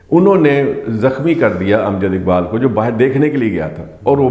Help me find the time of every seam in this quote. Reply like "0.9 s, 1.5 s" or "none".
none